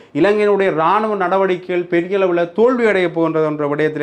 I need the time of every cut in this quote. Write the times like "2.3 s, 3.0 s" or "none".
none